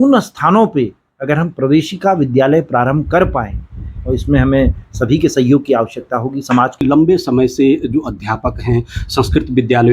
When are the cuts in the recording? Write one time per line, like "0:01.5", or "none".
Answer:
0:06.8